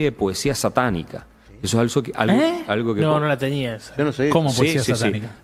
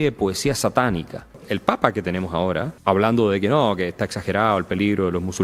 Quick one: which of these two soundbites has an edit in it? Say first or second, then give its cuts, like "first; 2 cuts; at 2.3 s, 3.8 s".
second; 2 cuts; at 1.5 s, 2.7 s